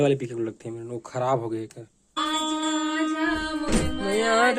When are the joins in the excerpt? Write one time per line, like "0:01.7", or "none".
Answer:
0:02.1